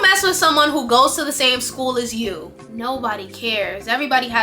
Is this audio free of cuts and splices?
no; 1 cut; at 2.6 s

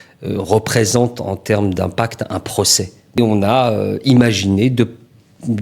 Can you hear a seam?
yes; 1 cut; at 3.2 s

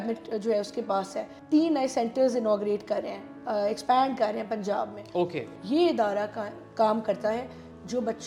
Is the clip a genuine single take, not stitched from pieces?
no; 2 cuts; at 1.3 s, 5.5 s

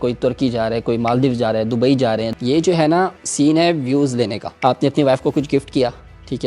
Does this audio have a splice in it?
yes; 3 cuts; at 2.3 s, 3.2 s, 4.4 s

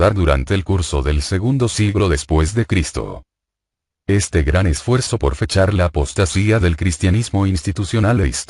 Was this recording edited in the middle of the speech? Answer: no; 0 cuts

